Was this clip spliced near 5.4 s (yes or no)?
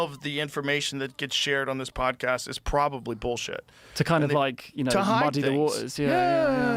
no